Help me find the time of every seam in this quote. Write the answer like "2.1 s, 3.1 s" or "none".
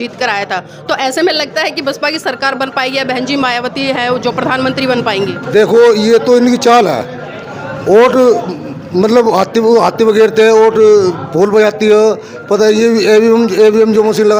none